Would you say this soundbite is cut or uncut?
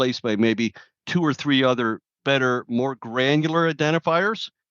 cut